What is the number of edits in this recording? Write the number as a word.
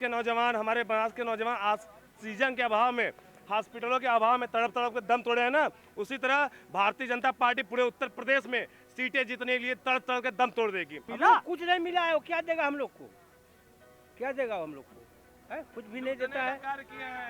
one